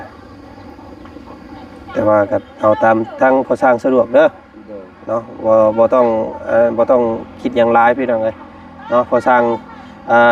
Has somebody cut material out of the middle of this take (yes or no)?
no